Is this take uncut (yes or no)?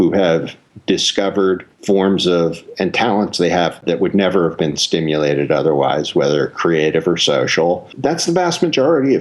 no